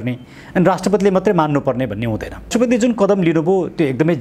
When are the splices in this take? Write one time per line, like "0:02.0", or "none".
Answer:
0:02.5